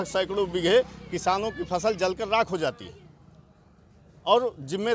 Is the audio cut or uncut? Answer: uncut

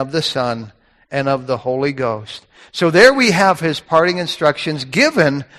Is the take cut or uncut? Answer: uncut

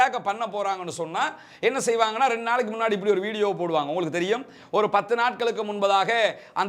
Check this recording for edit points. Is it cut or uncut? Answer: uncut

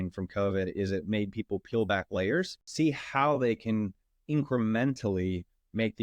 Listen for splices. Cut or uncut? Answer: cut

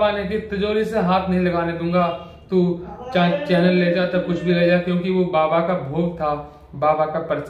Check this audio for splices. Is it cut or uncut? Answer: uncut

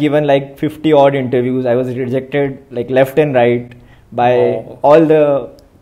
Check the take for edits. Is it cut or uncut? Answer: uncut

